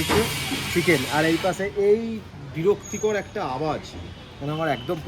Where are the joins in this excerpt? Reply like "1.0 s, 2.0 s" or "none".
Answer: none

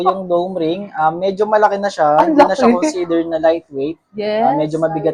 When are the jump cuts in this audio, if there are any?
none

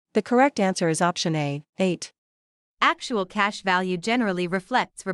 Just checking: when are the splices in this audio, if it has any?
1.4 s

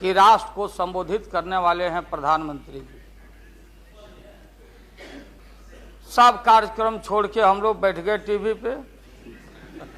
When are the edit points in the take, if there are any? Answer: 5.4 s

